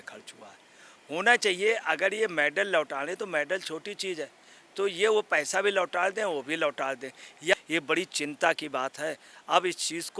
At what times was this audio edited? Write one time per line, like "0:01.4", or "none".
0:07.5